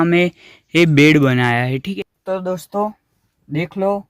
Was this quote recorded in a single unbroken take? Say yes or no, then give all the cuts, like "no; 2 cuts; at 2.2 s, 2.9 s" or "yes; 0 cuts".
no; 1 cut; at 1.8 s